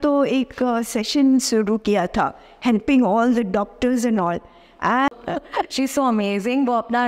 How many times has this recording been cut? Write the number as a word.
one